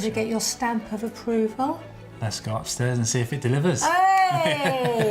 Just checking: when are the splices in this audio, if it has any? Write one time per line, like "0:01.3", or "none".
none